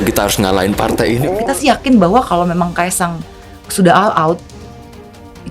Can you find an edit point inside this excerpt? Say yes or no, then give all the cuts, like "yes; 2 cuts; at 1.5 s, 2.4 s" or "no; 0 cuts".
yes; 1 cut; at 1.5 s